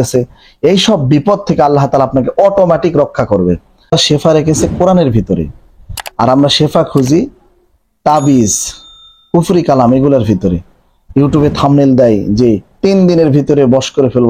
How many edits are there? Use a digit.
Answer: 1